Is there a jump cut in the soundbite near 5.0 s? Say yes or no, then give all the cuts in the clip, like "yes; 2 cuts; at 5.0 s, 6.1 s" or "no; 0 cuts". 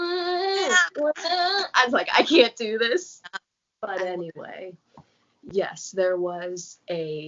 no; 1 cut; at 3.2 s